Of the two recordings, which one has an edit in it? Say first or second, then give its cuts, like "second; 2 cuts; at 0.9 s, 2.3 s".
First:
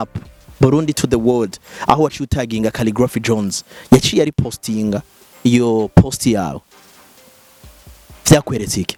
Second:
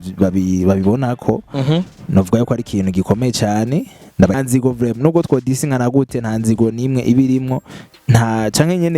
second; 1 cut; at 4.4 s